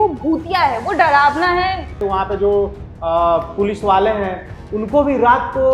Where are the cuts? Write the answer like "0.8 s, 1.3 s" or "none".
2.0 s